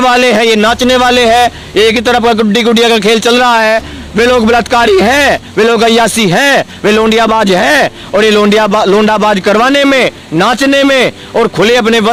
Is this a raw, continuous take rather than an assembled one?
yes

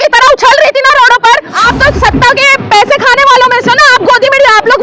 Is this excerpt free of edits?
no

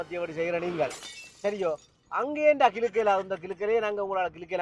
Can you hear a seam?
no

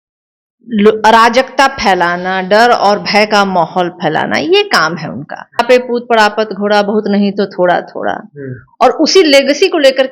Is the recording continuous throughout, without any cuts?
no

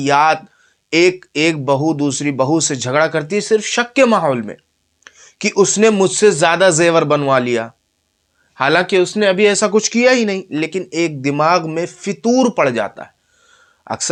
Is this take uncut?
yes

